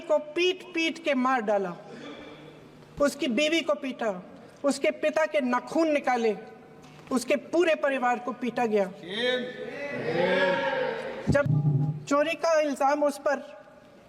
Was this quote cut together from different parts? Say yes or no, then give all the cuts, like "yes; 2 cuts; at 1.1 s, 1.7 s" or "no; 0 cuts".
yes; 1 cut; at 11.5 s